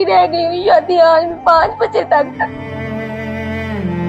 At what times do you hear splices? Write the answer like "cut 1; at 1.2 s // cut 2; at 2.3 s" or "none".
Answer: cut 1; at 2.5 s